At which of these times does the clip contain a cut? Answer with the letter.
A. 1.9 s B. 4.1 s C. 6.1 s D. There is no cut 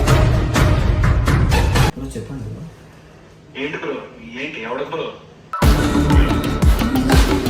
A